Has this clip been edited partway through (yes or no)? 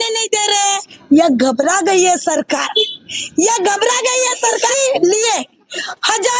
yes